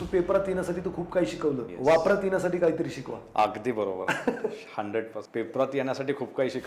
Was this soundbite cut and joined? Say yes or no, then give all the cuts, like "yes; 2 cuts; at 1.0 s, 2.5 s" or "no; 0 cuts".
yes; 2 cuts; at 1.7 s, 5.2 s